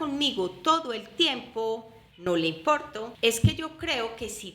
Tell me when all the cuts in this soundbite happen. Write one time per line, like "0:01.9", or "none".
0:03.0